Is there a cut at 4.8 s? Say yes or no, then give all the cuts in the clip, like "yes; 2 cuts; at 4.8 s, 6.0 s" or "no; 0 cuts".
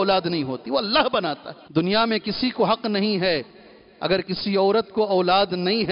no; 1 cut; at 1.5 s